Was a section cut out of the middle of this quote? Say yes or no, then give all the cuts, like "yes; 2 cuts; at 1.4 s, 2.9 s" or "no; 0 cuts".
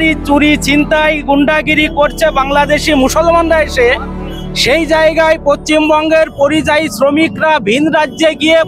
no; 0 cuts